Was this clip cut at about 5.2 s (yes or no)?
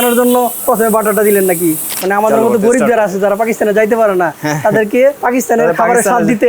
yes